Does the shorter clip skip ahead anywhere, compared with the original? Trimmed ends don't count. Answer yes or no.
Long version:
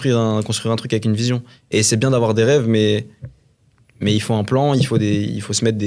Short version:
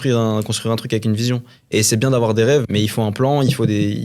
yes